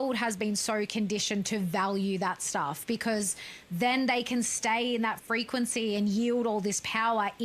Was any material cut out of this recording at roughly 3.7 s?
no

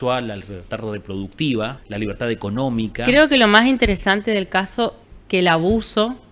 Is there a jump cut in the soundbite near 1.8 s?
yes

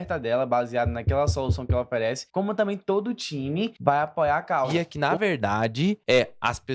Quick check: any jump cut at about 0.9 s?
no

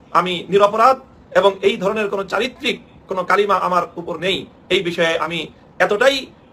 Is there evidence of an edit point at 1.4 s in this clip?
no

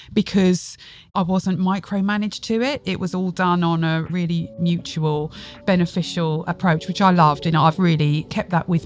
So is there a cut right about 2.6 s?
no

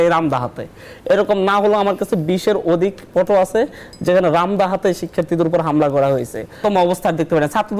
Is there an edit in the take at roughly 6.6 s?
yes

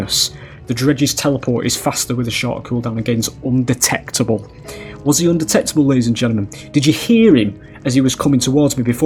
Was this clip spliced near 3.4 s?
no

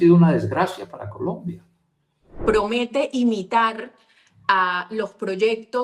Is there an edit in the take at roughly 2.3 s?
yes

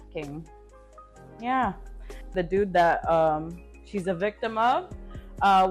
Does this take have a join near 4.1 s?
no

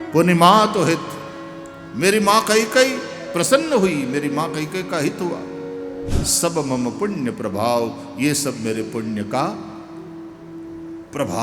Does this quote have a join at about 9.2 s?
no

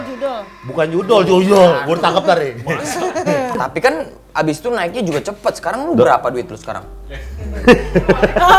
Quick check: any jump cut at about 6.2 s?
no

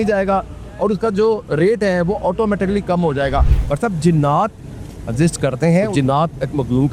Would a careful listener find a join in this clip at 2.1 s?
no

